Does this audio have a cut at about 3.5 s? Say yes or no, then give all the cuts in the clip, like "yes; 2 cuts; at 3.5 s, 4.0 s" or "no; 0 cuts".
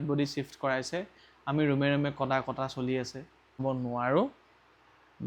yes; 1 cut; at 3.5 s